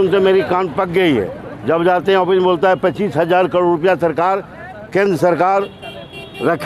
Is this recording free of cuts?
yes; 0 cuts

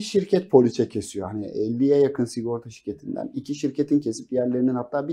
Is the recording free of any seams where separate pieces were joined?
yes; 0 cuts

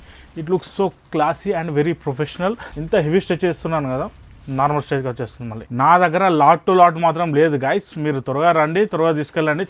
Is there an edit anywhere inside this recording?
yes; 2 cuts; at 2.7 s, 5.6 s

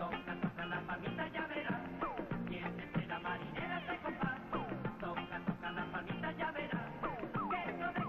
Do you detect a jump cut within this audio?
yes; 1 cut; at 5.0 s

